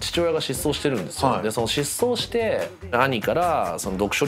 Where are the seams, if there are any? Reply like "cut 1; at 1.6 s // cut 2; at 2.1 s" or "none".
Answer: cut 1; at 2.9 s